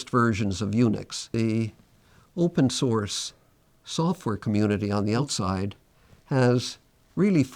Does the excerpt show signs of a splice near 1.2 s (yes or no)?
yes